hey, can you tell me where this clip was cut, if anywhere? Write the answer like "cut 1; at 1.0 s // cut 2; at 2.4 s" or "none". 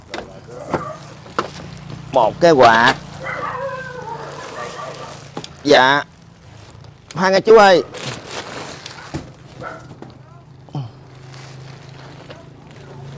none